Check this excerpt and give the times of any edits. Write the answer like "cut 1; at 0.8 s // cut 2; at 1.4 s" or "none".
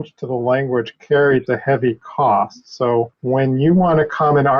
cut 1; at 3.1 s